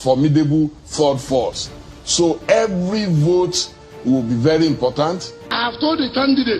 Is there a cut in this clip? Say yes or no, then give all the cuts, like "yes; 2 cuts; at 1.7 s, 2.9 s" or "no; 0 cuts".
yes; 1 cut; at 5.6 s